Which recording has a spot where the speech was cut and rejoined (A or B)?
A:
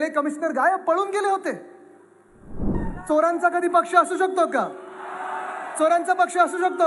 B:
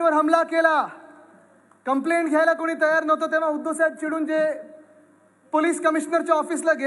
A